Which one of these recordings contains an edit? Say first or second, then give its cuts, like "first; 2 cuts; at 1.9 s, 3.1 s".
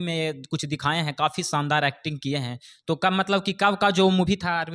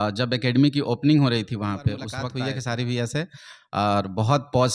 second; 1 cut; at 2.2 s